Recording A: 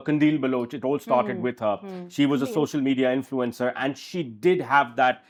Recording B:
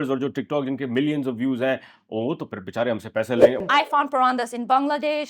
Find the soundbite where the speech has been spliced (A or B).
B